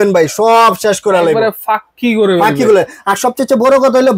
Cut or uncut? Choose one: uncut